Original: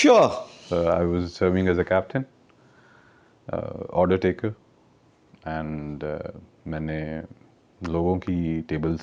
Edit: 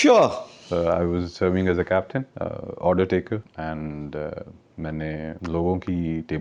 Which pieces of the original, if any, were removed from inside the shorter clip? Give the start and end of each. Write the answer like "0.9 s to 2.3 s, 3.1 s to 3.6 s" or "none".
2.3 s to 3.4 s, 4.6 s to 5.4 s, 7.2 s to 7.8 s